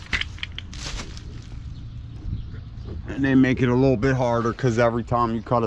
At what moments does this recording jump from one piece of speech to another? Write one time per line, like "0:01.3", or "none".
none